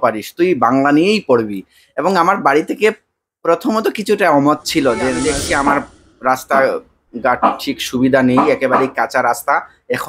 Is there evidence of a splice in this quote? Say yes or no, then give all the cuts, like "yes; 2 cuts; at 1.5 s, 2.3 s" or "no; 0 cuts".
yes; 1 cut; at 5.3 s